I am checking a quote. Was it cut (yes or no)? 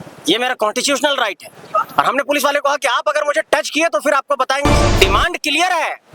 yes